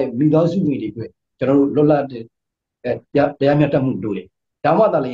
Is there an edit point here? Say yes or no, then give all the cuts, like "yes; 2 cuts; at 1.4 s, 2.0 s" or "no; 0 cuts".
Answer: no; 0 cuts